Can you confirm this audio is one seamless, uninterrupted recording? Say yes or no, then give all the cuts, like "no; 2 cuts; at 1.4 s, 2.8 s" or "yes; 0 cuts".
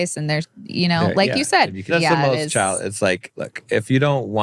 no; 1 cut; at 1.9 s